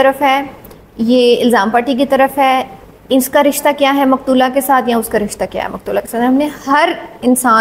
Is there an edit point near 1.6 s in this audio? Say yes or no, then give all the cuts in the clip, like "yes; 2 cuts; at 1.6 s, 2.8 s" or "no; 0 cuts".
no; 0 cuts